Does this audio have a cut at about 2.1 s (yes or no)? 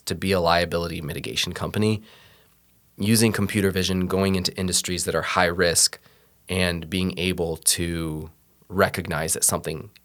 no